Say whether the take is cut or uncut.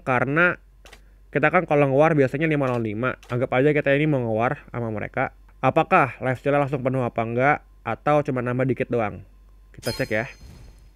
cut